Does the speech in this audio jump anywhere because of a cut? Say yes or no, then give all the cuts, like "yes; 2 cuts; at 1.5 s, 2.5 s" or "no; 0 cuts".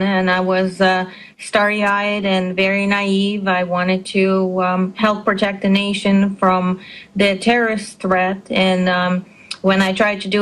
no; 0 cuts